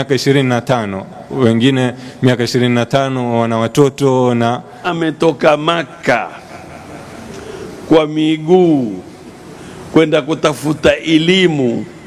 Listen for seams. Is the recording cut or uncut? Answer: cut